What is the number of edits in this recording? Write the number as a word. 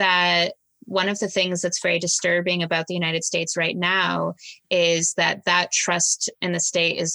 zero